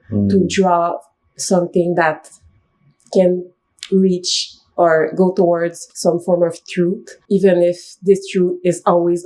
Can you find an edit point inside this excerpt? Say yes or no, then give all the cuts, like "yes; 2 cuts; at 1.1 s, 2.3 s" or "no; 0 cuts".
yes; 2 cuts; at 5.9 s, 7.1 s